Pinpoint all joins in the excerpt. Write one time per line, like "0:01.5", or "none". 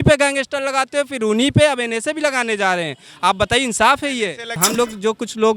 0:04.6

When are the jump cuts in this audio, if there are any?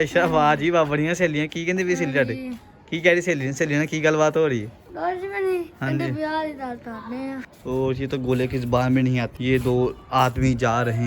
0:07.5
0:09.3

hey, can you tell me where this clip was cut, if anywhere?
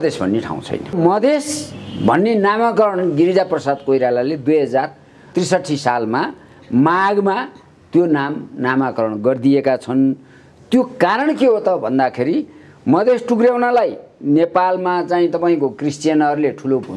0:00.9

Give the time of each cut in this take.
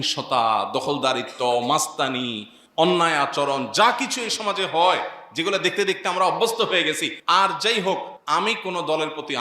0:07.1
0:08.1

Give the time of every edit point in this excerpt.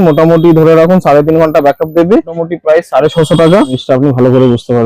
0:02.4
0:03.8

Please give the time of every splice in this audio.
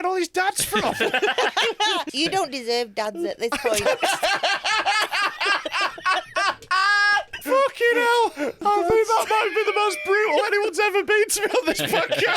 0:02.1
0:07.4
0:08.6

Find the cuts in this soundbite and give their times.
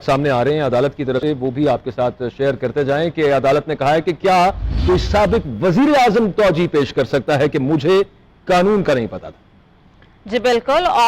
0:01.2

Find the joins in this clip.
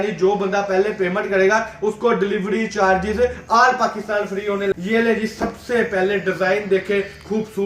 0:04.8

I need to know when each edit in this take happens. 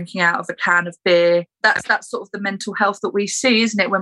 0:01.5

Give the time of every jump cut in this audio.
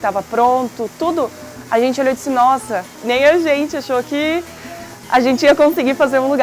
0:03.0

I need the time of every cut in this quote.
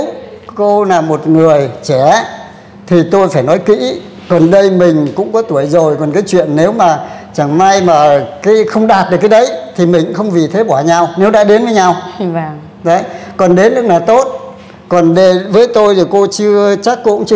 none

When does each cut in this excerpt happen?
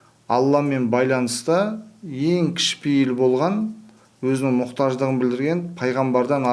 none

